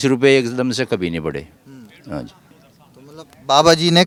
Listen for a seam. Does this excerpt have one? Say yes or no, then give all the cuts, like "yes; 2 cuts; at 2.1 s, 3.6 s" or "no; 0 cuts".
no; 0 cuts